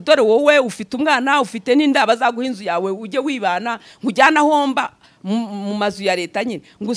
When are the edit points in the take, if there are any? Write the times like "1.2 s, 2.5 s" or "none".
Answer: none